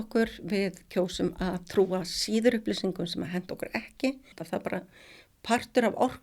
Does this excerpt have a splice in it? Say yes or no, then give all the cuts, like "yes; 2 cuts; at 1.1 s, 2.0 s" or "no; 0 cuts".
yes; 1 cut; at 4.3 s